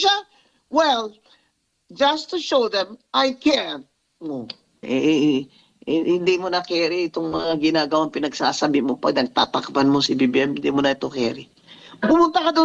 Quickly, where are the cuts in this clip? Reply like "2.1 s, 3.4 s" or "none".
4.8 s